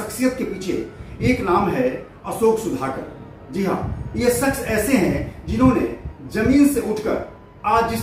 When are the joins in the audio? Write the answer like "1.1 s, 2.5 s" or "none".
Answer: none

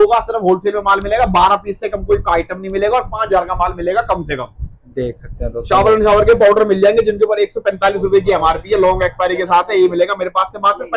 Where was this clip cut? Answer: none

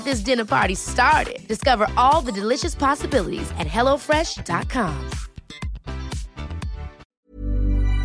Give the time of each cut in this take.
7.0 s

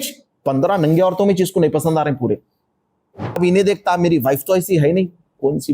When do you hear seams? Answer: 3.4 s

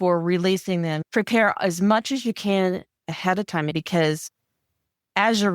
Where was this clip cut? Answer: 1.0 s, 3.7 s

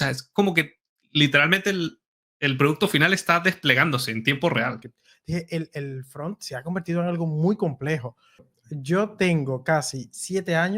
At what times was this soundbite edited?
4.9 s, 8.4 s

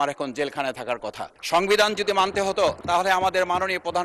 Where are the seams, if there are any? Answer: 1.3 s, 2.8 s

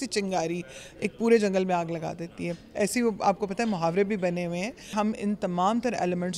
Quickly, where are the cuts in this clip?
4.9 s

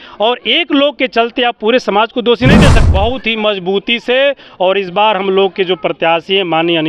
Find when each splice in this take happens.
2.8 s

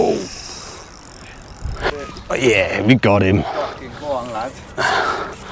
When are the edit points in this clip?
1.9 s

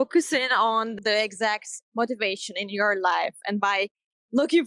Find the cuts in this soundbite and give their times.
1.0 s

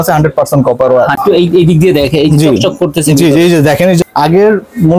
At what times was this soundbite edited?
1.1 s, 4.0 s

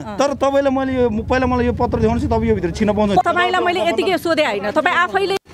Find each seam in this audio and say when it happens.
3.2 s

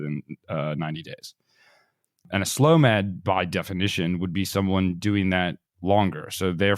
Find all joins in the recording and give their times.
2.2 s

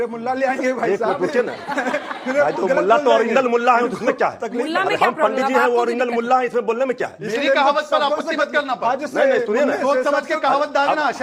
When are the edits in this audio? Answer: none

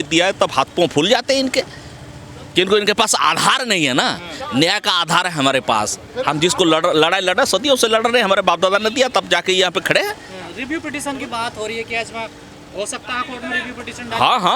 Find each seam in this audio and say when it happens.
none

